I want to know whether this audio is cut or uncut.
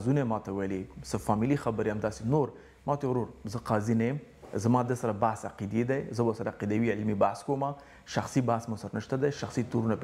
uncut